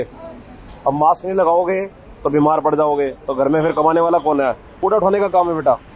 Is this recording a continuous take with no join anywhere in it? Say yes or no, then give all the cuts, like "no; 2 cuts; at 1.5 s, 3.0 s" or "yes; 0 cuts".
no; 1 cut; at 4.8 s